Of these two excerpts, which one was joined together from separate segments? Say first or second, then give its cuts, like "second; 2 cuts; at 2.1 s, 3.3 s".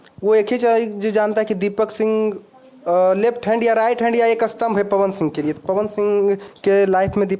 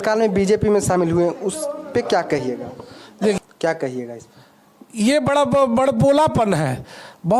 second; 1 cut; at 3.4 s